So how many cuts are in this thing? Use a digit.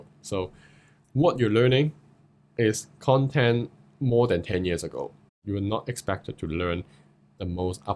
1